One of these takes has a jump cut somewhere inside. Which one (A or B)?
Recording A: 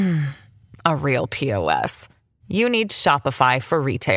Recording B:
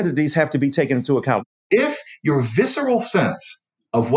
B